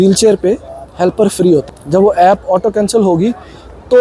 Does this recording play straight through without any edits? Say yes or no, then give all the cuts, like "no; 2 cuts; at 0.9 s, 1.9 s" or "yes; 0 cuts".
no; 1 cut; at 1.6 s